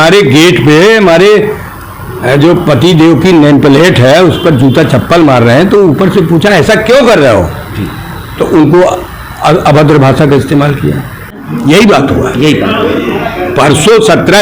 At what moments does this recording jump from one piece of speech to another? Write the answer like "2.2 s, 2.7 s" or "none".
11.5 s